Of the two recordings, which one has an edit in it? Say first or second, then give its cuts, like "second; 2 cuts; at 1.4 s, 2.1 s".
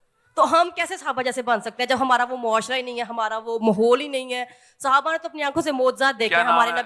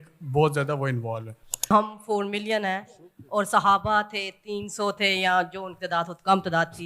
second; 1 cut; at 1.7 s